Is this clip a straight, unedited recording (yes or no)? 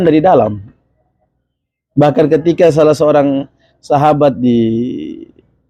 yes